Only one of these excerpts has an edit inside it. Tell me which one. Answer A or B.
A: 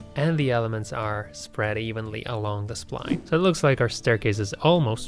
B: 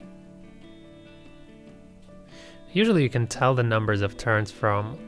A